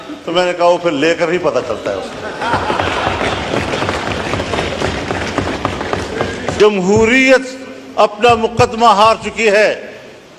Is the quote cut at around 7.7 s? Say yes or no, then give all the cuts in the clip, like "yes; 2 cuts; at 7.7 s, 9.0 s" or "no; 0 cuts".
no; 1 cut; at 6.4 s